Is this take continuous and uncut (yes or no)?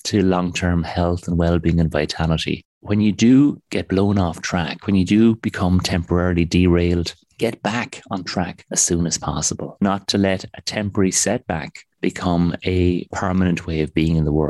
no